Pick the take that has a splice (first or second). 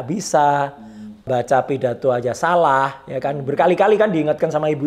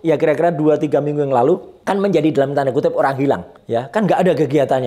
second